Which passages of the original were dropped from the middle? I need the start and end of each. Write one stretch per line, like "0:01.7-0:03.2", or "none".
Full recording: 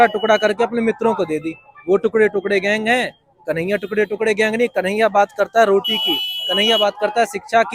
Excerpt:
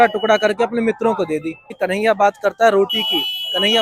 0:01.8-0:04.7